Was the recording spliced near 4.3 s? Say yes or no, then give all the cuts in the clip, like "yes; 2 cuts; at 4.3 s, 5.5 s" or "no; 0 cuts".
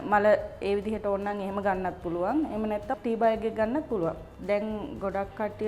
yes; 1 cut; at 4.3 s